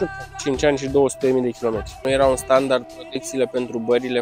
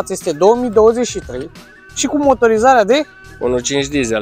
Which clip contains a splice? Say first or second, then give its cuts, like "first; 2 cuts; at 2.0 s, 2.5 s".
first; 1 cut; at 1.9 s